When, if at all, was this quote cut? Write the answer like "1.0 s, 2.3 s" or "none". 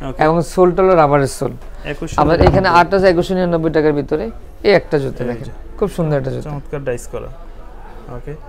none